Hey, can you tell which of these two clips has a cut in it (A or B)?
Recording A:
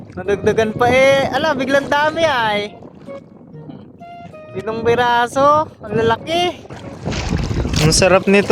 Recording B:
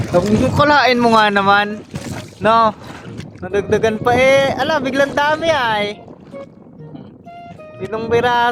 A